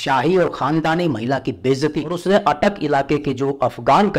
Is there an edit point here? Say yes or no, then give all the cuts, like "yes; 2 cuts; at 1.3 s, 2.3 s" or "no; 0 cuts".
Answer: yes; 1 cut; at 2.1 s